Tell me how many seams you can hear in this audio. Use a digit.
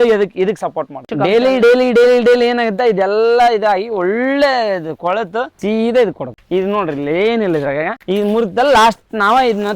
4